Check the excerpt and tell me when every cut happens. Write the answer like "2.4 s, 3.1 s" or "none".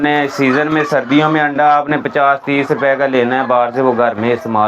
none